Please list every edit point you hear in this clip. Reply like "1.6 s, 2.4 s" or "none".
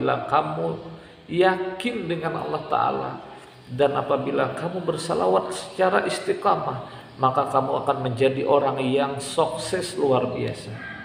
none

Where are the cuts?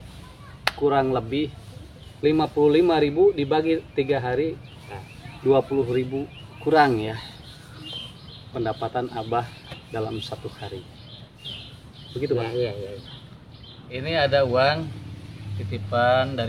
13.9 s

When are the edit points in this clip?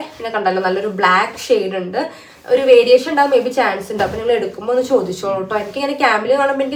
none

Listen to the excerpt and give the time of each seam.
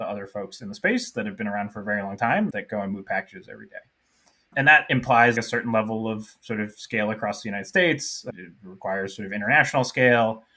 2.5 s

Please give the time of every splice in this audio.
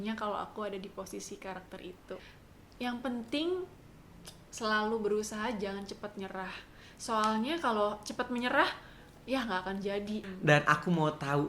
2.2 s, 10.2 s

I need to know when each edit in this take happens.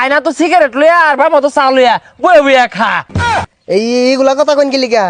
3.4 s

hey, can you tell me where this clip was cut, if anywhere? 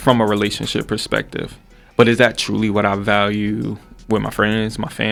none

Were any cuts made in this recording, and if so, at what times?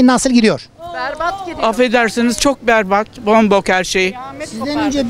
none

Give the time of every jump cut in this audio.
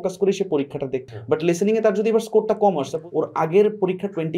1.0 s, 3.0 s

